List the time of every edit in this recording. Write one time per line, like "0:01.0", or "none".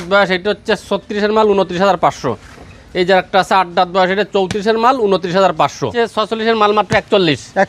0:05.9